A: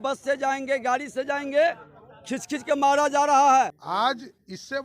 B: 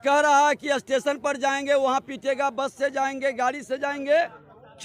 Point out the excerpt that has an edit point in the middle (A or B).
A